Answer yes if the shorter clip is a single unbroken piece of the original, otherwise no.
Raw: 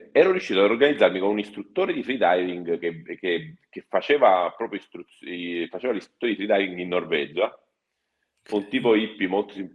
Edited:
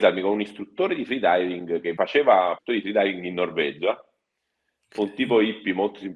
no